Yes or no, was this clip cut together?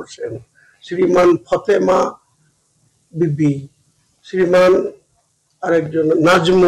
no